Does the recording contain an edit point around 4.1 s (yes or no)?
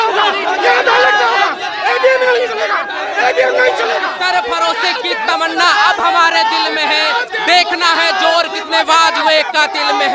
yes